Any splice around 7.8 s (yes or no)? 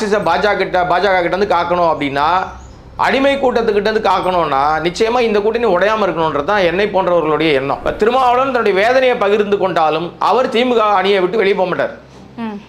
yes